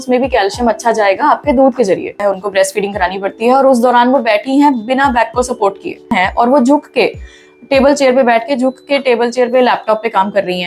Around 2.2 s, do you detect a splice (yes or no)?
yes